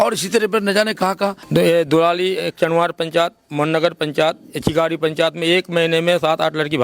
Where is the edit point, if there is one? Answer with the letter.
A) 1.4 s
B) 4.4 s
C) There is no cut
A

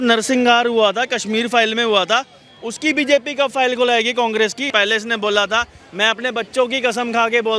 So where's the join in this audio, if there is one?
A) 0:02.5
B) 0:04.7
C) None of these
B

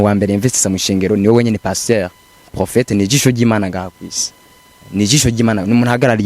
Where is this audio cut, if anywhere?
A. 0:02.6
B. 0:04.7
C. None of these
A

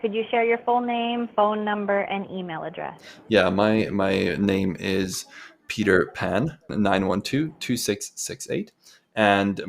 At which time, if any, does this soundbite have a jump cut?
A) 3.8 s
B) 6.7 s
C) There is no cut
B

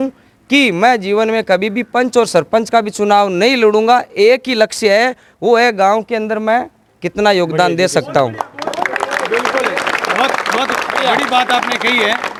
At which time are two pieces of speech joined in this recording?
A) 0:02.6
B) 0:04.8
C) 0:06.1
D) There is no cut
D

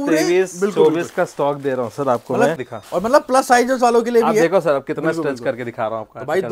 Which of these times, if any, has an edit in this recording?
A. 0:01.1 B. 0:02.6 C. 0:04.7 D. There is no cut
B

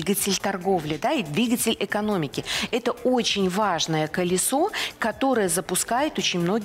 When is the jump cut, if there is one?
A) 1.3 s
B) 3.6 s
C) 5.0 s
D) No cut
D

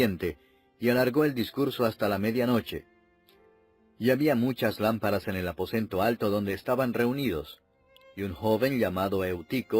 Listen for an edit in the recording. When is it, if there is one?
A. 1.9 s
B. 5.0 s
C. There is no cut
A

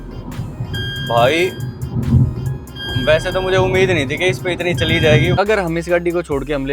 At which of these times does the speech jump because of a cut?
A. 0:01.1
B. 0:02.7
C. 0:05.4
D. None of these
C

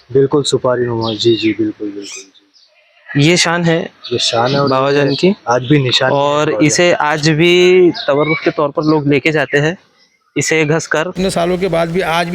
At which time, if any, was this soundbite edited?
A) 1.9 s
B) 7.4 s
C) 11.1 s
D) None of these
C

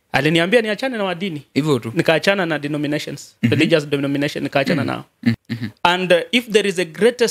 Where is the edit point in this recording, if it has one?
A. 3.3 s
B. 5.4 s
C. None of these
B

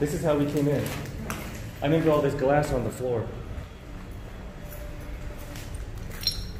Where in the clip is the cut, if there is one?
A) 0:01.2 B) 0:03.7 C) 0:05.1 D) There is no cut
D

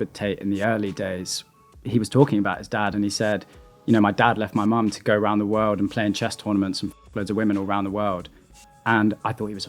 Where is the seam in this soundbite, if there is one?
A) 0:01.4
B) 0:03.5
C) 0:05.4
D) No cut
D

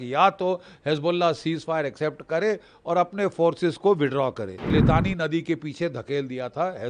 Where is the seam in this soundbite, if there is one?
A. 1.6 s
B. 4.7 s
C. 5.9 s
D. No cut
B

